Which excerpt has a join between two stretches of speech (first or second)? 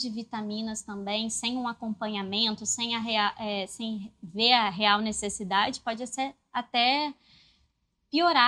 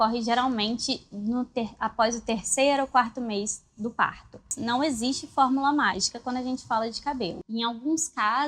second